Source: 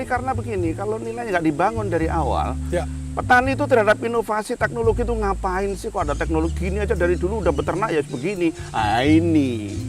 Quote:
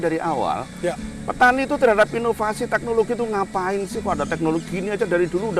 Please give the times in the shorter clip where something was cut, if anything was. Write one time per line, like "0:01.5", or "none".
none

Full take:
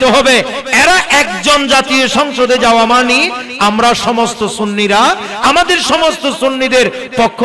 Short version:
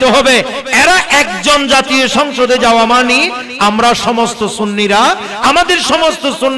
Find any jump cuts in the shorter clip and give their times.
none

